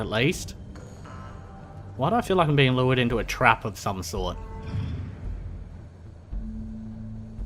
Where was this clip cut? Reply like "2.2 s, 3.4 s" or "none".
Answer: none

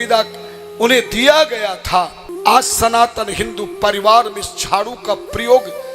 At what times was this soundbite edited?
2.2 s

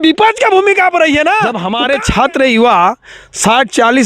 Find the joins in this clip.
1.6 s

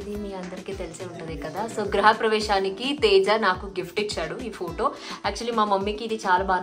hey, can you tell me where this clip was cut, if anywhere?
none

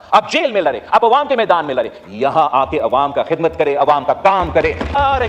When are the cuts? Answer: none

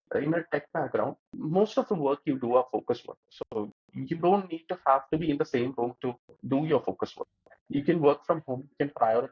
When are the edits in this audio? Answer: 1.3 s, 6.3 s

